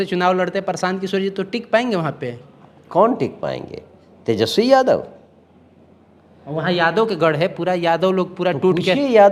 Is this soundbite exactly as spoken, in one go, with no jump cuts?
yes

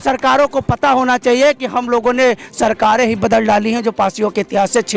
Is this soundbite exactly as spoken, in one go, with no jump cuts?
yes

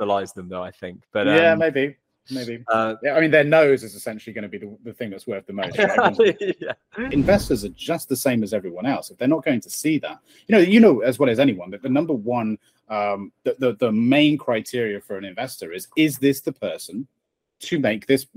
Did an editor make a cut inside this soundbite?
yes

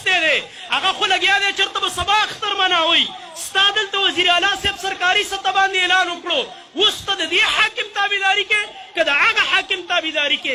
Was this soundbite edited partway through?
no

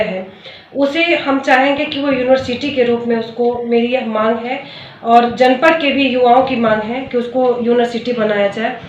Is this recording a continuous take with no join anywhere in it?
yes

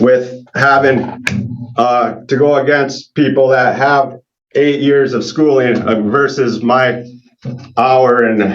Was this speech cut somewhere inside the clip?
no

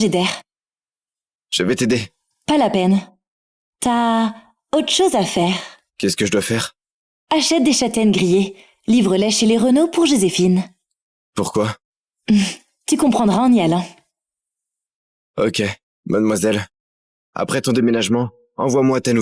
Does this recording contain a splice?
yes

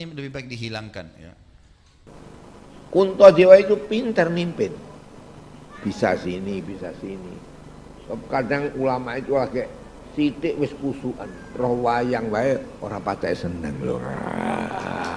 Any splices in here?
yes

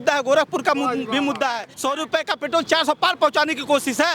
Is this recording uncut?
no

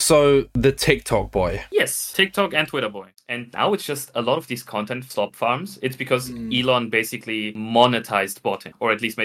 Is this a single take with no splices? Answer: no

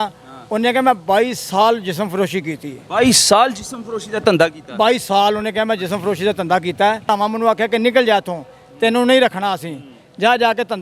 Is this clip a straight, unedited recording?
no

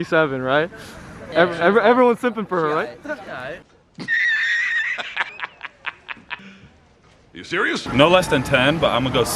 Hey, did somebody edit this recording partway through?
yes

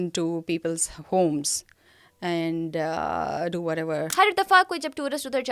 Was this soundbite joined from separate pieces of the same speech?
yes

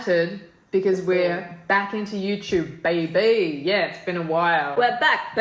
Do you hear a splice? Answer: no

